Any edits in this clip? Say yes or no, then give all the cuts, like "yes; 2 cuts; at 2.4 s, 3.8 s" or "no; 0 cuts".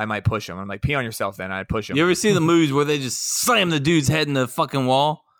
yes; 1 cut; at 1.9 s